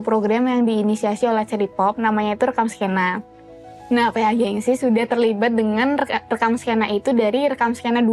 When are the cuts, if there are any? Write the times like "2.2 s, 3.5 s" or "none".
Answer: none